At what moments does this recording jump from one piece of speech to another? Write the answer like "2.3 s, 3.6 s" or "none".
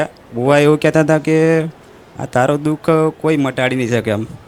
none